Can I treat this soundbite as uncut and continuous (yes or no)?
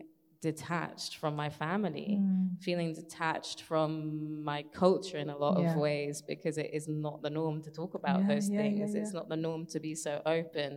yes